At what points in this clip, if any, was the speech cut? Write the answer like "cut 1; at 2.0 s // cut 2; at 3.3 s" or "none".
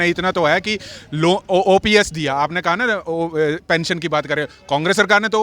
none